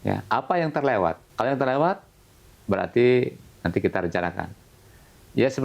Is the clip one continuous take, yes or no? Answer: no